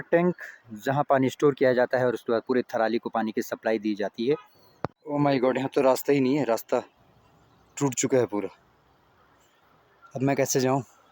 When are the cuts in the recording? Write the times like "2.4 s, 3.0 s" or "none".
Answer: 5.0 s